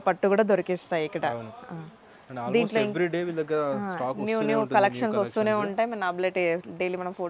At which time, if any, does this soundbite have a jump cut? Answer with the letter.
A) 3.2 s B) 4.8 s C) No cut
C